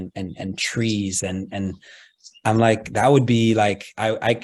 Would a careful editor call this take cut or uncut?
uncut